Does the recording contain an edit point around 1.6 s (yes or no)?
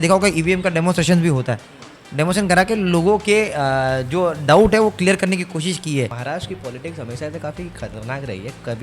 no